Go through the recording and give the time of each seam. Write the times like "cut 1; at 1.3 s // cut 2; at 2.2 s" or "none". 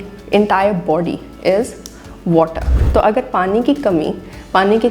cut 1; at 2.8 s